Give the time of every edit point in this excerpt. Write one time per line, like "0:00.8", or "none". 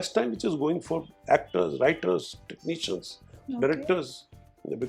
none